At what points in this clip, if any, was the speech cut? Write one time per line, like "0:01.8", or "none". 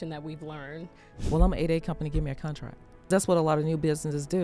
0:01.1
0:03.1

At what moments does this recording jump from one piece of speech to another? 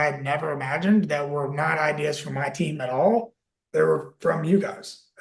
none

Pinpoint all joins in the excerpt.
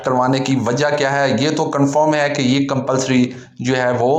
none

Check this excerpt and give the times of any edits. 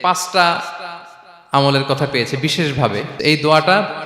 0:03.1

